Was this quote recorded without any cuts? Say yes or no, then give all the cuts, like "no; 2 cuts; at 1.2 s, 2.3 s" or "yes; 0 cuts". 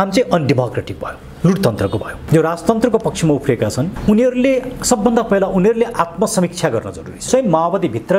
no; 2 cuts; at 2.1 s, 7.3 s